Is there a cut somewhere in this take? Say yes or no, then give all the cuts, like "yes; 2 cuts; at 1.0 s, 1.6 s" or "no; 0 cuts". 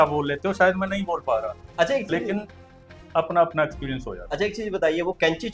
no; 0 cuts